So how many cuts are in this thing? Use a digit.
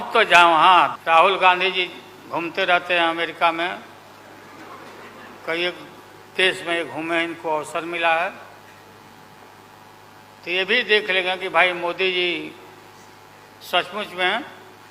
1